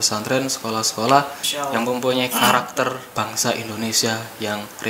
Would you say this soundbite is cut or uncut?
cut